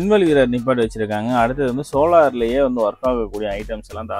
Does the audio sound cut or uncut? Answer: uncut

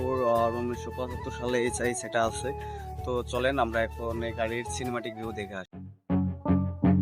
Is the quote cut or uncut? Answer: uncut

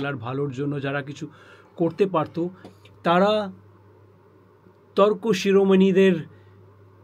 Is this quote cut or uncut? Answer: uncut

